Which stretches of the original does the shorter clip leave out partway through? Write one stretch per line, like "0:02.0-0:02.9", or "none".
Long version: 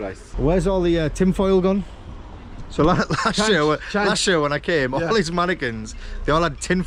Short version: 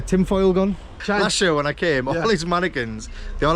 0:02.1-0:03.8